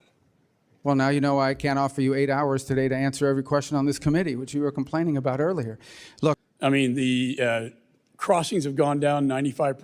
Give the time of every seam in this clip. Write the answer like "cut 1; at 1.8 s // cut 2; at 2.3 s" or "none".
cut 1; at 6.4 s